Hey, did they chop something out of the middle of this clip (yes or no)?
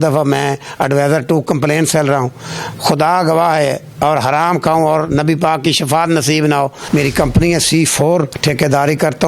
yes